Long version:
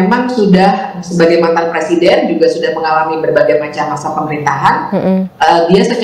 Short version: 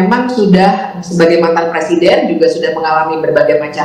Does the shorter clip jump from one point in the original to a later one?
no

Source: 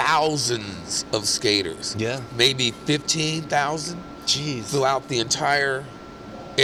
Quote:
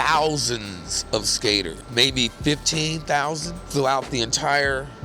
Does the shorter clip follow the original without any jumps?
no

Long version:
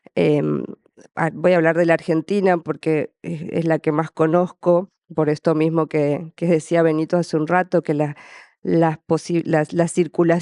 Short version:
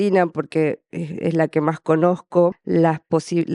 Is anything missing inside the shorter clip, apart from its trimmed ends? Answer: yes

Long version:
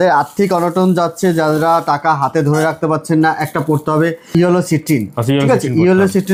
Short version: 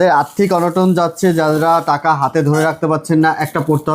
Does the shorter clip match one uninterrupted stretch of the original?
yes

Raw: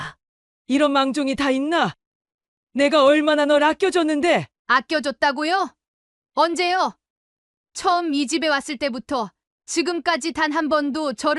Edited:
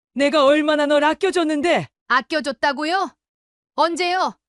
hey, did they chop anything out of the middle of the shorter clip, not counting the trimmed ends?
no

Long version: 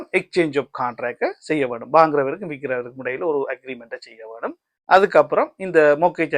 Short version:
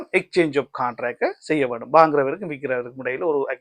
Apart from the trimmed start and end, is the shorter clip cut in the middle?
no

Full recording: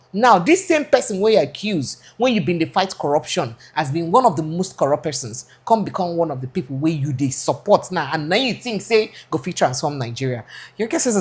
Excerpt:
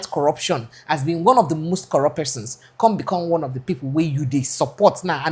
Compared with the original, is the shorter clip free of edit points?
yes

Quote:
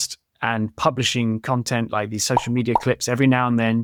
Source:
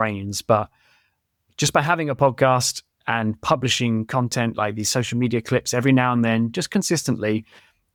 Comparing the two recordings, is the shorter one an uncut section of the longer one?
yes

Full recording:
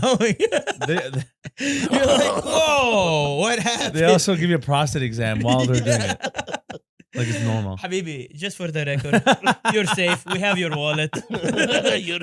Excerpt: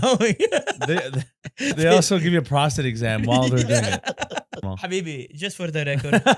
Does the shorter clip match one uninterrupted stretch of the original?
no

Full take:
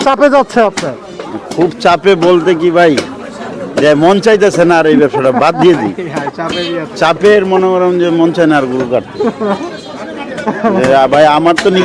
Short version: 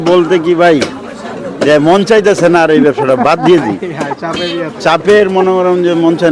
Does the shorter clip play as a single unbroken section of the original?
yes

